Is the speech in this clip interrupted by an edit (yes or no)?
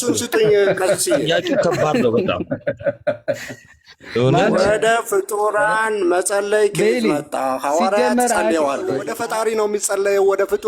yes